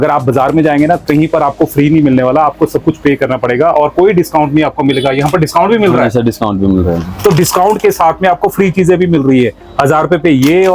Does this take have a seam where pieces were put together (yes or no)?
no